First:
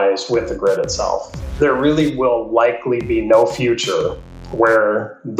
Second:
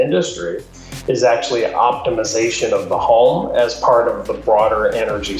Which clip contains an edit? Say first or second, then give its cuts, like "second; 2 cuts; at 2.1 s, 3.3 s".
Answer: first; 1 cut; at 1.5 s